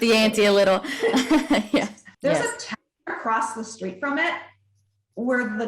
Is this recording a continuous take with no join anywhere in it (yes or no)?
no